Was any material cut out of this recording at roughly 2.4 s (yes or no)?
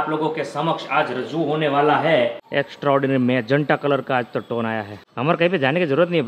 yes